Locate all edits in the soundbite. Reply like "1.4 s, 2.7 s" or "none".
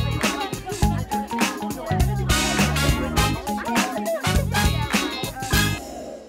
0.9 s